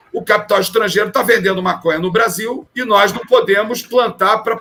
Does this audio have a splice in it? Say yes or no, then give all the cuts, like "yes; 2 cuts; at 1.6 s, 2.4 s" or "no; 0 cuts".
no; 0 cuts